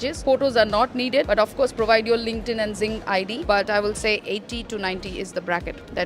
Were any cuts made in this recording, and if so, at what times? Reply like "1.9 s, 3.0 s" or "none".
1.3 s, 3.4 s